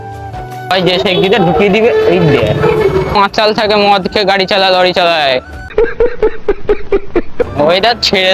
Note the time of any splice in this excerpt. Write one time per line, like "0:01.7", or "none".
0:03.2
0:07.4